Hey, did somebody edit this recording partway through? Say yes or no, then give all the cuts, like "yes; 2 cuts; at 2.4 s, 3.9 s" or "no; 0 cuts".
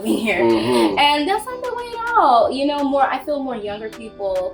no; 0 cuts